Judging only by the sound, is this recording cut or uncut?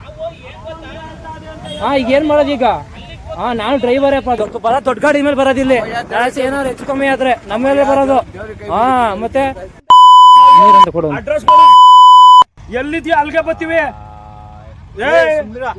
cut